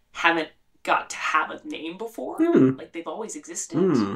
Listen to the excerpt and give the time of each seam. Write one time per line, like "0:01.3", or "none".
none